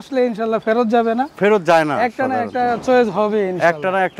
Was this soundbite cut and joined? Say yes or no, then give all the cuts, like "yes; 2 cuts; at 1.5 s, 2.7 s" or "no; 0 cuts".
no; 0 cuts